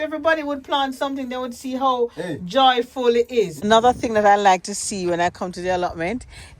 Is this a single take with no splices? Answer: no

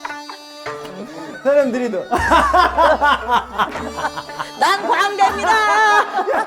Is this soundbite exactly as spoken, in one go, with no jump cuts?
yes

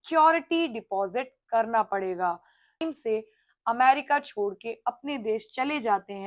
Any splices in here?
yes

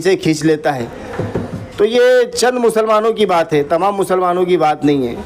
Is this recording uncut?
yes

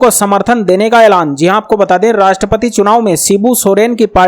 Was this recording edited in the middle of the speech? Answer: no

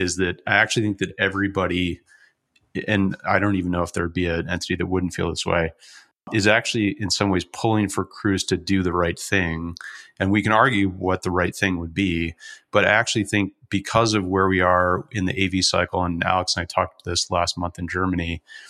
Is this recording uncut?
no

